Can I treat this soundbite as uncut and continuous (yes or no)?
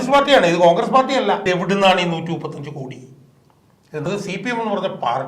no